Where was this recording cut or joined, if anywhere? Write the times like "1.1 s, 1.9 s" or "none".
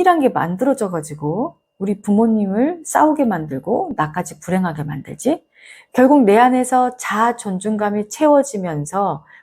5.8 s